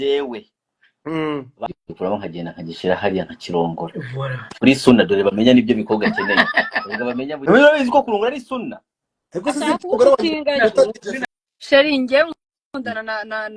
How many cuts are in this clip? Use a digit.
3